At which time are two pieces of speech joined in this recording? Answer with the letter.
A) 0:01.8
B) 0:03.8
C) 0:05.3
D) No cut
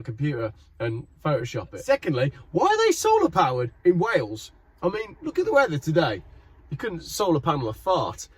A